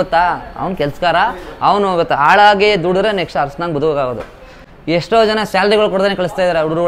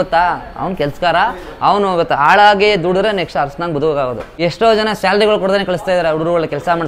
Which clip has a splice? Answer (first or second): second